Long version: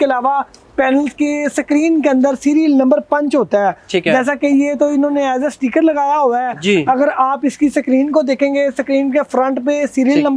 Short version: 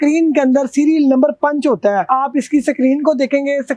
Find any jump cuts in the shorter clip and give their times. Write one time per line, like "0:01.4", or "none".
0:02.1